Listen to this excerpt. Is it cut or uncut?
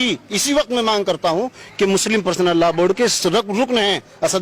uncut